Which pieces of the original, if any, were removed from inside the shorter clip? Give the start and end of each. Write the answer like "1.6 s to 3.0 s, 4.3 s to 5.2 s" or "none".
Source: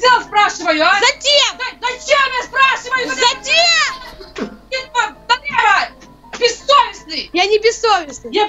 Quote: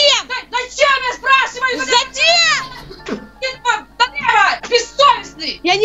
5.9 s to 6.3 s